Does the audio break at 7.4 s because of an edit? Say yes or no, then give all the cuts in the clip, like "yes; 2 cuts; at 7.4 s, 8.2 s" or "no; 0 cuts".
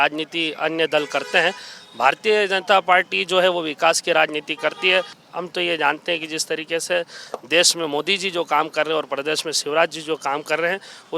no; 1 cut; at 5.2 s